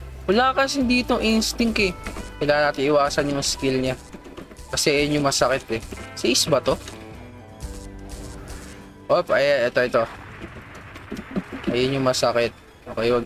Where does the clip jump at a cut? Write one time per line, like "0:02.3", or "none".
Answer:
none